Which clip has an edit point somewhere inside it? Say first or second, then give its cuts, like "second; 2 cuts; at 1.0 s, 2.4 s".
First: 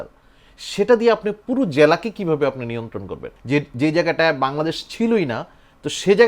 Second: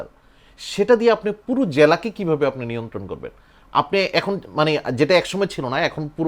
first; 1 cut; at 3.3 s